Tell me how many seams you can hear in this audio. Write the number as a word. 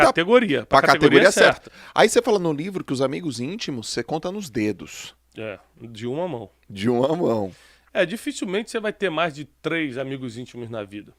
one